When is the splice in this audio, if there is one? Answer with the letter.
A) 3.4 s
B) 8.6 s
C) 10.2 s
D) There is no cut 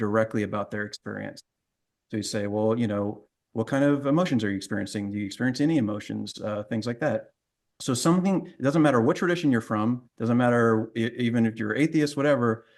D